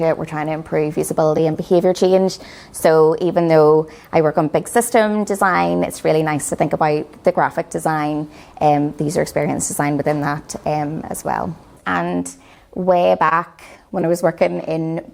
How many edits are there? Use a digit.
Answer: 1